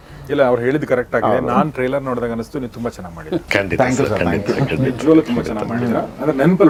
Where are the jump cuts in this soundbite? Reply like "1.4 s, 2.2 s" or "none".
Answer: none